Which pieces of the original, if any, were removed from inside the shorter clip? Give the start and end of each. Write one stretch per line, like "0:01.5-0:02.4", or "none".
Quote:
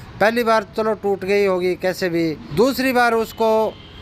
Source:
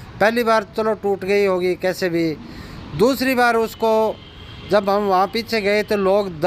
0:02.4-0:02.8